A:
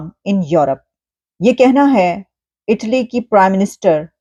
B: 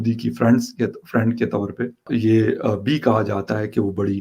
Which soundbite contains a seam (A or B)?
B